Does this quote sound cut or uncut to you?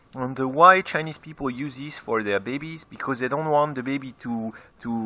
cut